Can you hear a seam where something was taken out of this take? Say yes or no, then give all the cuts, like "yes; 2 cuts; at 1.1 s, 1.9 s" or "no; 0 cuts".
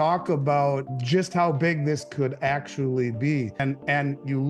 yes; 2 cuts; at 0.9 s, 3.6 s